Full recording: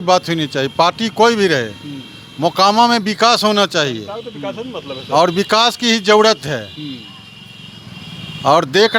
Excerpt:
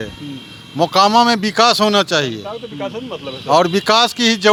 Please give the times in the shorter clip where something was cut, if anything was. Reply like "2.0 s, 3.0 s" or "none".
none